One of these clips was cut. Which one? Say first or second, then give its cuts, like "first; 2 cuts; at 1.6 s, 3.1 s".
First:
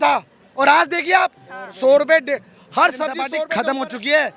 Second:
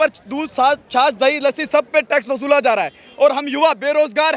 first; 1 cut; at 3.3 s